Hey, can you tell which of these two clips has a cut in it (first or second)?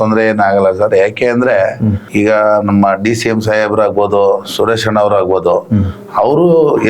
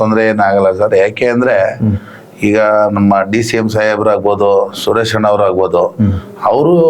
first